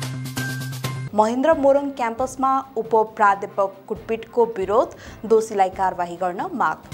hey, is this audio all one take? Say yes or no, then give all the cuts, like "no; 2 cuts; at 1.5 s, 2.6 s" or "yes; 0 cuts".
yes; 0 cuts